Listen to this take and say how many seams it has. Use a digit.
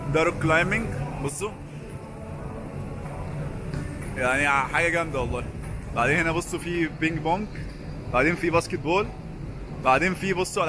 0